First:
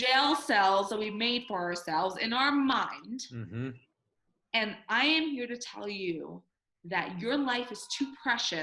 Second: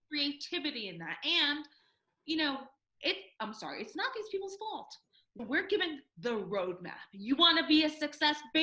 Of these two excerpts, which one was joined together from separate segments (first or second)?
second